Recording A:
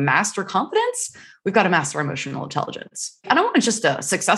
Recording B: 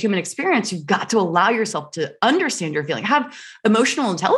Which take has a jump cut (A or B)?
A